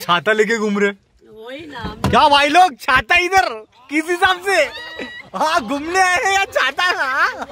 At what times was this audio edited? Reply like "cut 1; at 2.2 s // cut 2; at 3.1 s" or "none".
none